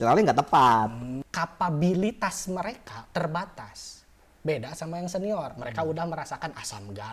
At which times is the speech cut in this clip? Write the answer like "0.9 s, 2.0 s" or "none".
1.2 s